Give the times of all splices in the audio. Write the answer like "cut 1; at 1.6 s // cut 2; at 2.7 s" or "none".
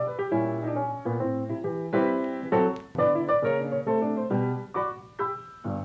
none